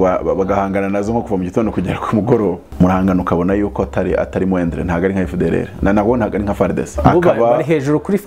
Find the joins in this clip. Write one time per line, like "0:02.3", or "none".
0:02.6
0:06.9